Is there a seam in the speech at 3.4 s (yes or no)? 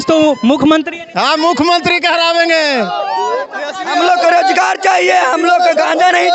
yes